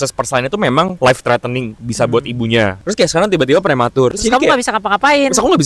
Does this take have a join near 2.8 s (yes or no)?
yes